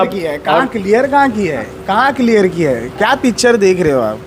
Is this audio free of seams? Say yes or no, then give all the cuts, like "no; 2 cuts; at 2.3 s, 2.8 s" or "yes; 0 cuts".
yes; 0 cuts